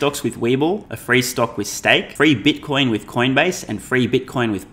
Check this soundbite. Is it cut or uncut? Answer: cut